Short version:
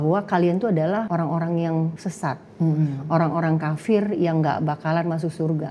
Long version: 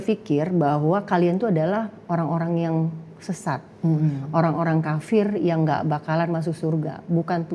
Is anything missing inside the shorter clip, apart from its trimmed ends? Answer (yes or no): yes